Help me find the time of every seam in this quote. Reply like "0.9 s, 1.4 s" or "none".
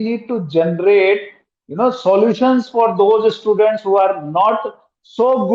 none